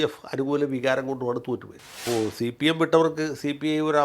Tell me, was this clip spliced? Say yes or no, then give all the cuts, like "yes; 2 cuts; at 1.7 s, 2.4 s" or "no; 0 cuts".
yes; 1 cut; at 1.9 s